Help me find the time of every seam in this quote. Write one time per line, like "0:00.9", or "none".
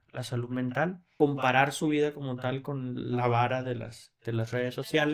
0:01.1